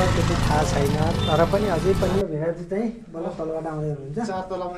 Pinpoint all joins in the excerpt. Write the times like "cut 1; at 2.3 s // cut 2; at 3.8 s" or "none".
cut 1; at 2.2 s